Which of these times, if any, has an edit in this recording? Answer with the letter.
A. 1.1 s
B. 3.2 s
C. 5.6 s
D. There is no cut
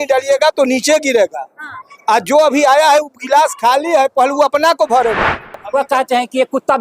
C